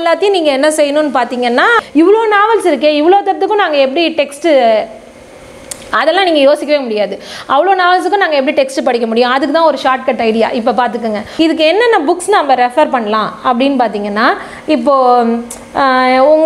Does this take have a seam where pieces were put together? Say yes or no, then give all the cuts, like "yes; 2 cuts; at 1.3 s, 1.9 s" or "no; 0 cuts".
yes; 2 cuts; at 1.8 s, 11.3 s